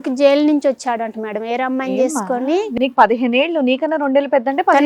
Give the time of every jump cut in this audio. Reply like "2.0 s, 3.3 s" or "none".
none